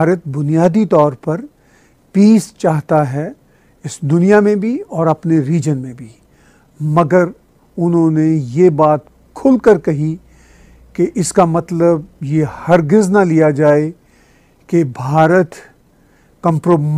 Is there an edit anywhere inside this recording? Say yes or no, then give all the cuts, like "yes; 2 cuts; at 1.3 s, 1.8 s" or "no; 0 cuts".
no; 0 cuts